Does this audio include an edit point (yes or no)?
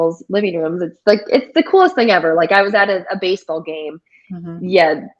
no